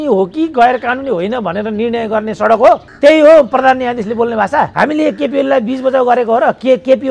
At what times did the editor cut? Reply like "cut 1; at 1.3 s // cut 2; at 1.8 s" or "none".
cut 1; at 2.9 s // cut 2; at 4.7 s